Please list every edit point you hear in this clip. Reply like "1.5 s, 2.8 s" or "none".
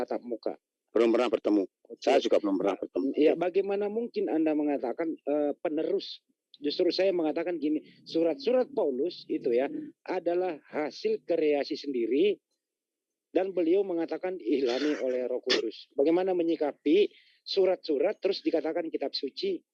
none